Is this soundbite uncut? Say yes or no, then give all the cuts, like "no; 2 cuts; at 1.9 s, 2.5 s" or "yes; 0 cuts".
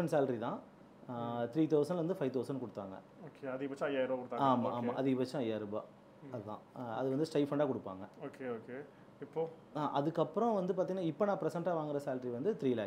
yes; 0 cuts